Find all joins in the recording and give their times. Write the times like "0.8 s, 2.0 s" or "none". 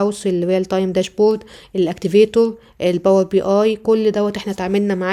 none

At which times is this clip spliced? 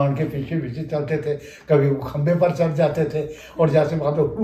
none

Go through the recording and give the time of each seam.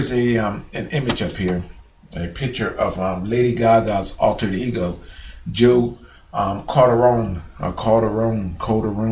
4.6 s

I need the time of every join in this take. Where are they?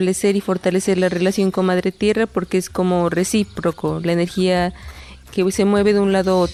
none

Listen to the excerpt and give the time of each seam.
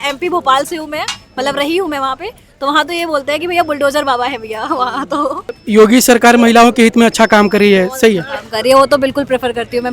5.5 s

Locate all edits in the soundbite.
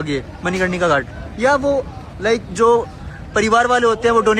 none

